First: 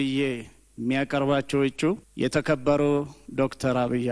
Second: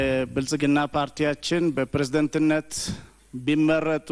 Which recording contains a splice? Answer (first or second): first